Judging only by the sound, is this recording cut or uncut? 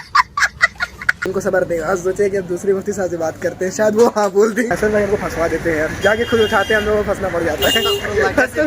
cut